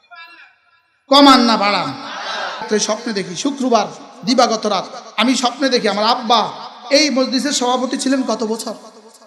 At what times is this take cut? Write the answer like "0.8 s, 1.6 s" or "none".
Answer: 2.6 s